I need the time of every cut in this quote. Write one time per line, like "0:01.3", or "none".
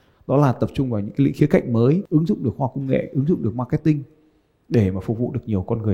0:02.0